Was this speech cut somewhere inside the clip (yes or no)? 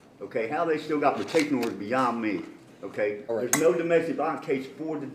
yes